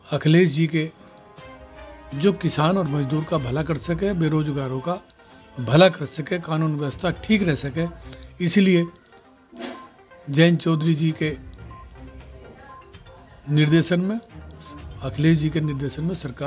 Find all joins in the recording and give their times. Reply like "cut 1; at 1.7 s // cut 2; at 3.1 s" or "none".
none